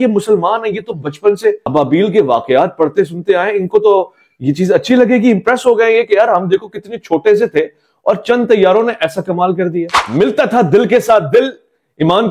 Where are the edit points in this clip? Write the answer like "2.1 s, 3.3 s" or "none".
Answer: 10.0 s